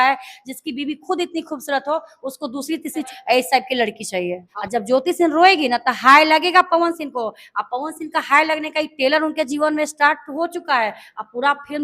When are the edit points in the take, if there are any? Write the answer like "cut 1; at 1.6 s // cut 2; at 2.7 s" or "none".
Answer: cut 1; at 3.1 s // cut 2; at 4.5 s